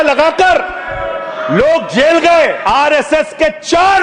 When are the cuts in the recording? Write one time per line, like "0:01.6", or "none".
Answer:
0:02.8